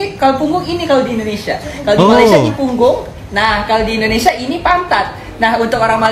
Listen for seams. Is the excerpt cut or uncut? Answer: uncut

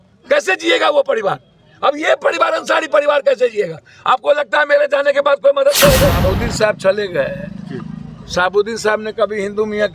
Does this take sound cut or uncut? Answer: cut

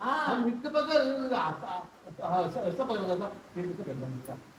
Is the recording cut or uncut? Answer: uncut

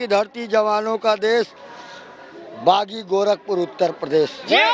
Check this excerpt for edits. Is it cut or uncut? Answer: uncut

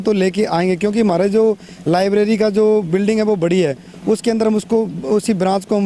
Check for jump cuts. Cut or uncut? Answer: uncut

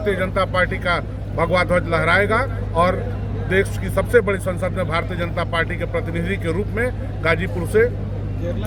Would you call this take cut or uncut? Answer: uncut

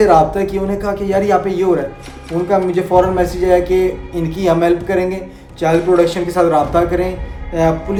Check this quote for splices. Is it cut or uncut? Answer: uncut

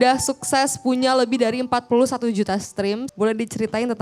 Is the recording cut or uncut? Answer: cut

